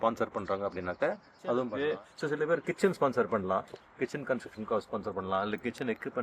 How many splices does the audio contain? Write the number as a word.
one